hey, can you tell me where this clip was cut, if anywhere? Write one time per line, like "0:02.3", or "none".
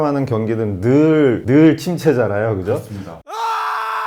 none